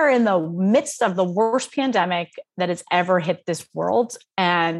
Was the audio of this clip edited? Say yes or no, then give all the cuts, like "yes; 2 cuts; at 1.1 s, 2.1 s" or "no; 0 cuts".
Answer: no; 0 cuts